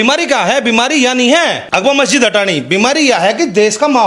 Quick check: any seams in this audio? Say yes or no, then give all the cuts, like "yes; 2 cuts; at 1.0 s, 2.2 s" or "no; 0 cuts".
yes; 1 cut; at 1.6 s